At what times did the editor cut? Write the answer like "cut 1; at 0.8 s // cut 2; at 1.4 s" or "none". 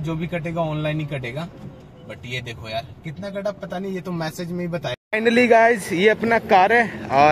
cut 1; at 5.0 s